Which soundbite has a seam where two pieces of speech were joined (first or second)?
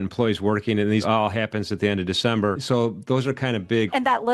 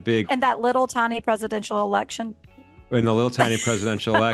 first